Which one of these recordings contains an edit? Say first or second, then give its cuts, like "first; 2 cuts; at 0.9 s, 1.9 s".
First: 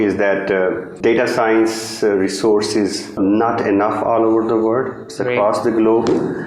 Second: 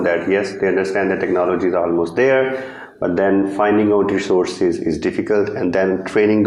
first; 2 cuts; at 0.9 s, 3.2 s